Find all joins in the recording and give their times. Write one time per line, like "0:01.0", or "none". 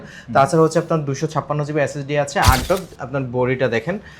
0:02.6